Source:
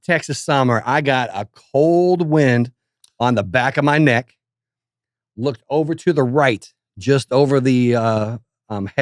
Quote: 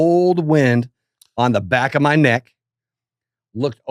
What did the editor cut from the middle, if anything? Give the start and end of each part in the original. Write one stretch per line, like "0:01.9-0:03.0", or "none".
none